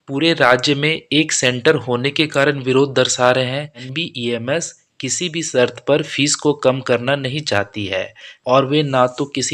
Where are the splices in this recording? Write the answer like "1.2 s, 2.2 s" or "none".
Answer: 4.0 s, 8.3 s